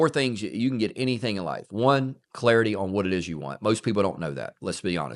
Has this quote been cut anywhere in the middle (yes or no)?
no